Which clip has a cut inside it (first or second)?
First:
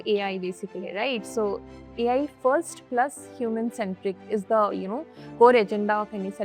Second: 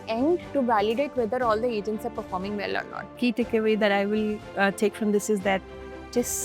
second